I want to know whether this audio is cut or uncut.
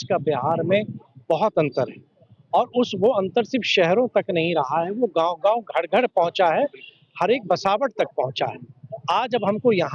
uncut